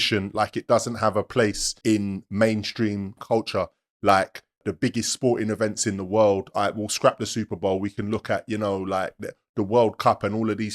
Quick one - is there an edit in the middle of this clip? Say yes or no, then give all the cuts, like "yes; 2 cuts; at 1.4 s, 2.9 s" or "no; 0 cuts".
yes; 3 cuts; at 1.7 s, 3.2 s, 4.6 s